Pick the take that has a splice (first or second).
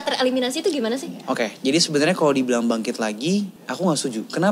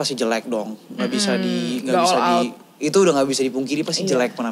first